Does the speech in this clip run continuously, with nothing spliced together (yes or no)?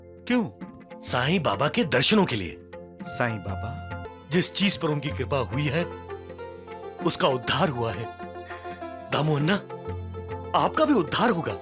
no